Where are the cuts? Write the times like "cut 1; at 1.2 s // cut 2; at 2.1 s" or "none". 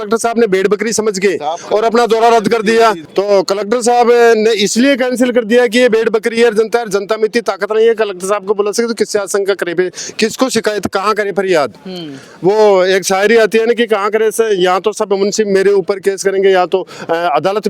none